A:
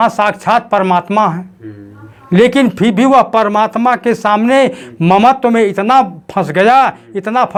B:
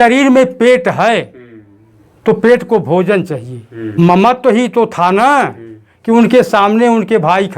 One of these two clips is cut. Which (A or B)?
B